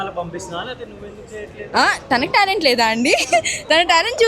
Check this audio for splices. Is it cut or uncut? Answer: uncut